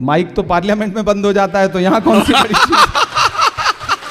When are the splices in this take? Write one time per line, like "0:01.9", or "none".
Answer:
none